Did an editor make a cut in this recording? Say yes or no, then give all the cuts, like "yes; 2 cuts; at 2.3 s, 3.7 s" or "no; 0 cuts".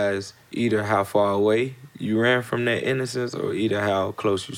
no; 0 cuts